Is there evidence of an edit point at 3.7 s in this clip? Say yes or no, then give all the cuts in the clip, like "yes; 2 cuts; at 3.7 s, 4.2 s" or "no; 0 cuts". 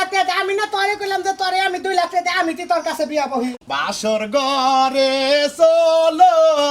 yes; 1 cut; at 3.7 s